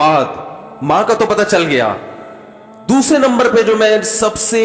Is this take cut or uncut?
uncut